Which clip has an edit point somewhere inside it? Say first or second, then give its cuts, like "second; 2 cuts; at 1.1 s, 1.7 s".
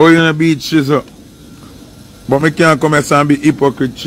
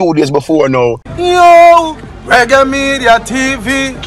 second; 1 cut; at 1.1 s